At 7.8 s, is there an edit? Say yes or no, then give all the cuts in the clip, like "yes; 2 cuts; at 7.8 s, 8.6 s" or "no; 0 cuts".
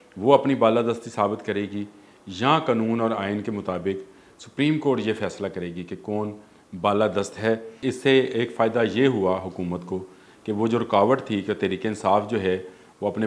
yes; 1 cut; at 7.8 s